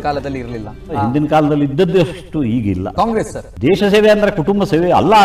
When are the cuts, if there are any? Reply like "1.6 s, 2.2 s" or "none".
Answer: 0.9 s, 3.4 s